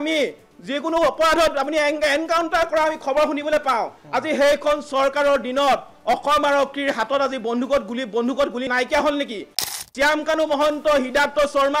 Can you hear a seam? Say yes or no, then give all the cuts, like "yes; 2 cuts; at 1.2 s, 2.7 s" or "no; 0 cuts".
yes; 1 cut; at 9.7 s